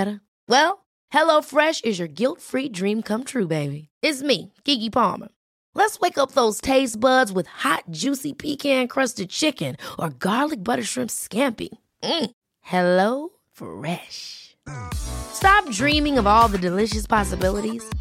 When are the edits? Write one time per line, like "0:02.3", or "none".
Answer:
none